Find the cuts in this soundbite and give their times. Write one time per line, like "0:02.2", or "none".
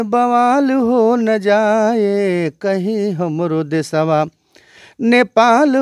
none